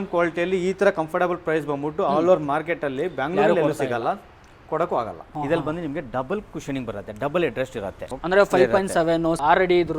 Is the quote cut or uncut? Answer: cut